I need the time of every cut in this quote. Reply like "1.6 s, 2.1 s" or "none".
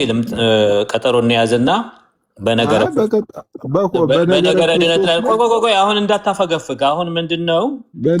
none